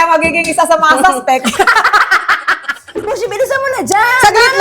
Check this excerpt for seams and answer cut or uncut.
cut